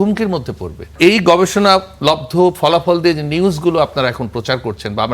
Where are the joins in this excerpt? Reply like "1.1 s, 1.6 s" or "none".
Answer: 0.9 s